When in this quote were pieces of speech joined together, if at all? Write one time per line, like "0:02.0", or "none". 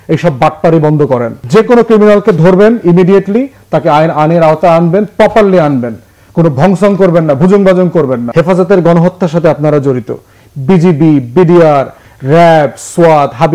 0:01.4
0:08.2